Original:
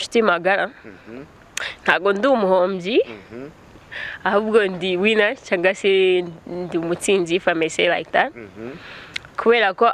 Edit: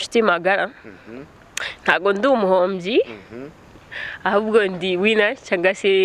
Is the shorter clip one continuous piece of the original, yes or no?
yes